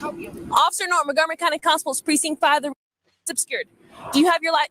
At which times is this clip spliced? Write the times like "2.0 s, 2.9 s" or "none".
3.4 s